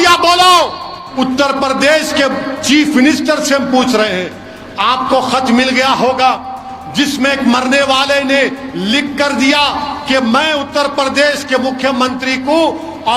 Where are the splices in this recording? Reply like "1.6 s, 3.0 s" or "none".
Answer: 1.0 s